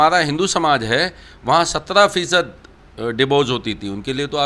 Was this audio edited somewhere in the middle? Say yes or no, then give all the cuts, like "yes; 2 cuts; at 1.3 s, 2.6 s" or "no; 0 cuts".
no; 0 cuts